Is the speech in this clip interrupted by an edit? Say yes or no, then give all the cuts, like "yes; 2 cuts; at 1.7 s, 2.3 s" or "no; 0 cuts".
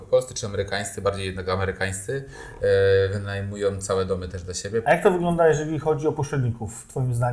yes; 1 cut; at 4.8 s